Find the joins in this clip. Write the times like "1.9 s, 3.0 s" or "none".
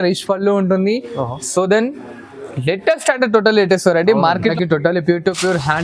4.5 s